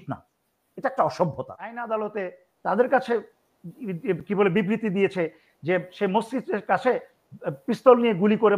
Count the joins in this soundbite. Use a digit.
1